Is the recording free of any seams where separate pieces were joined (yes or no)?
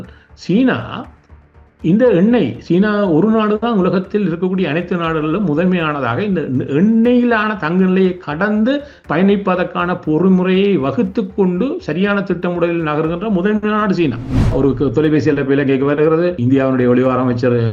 no